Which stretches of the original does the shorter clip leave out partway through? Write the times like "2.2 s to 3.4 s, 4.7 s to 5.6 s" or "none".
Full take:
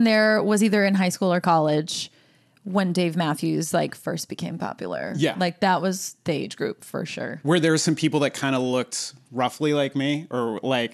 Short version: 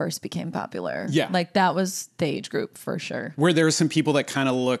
none